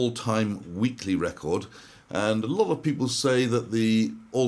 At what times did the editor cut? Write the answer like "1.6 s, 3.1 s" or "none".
none